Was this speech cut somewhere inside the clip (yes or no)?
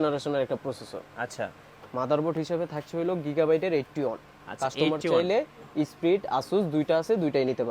no